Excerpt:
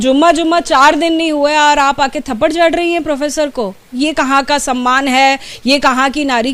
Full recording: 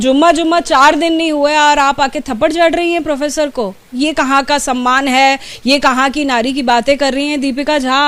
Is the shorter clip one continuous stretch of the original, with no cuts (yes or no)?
yes